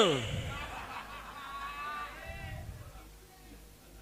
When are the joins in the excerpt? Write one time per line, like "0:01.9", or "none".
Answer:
none